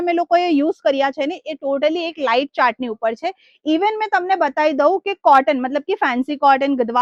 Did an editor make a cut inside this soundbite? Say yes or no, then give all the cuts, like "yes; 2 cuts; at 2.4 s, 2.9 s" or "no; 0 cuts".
no; 0 cuts